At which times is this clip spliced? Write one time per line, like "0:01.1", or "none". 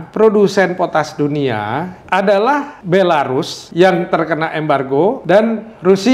0:01.9
0:02.8
0:03.6
0:05.2